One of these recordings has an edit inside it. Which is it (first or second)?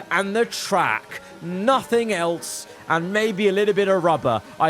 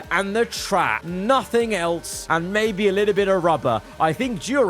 second